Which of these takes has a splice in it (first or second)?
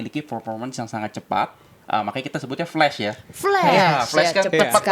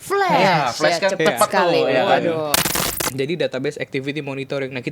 second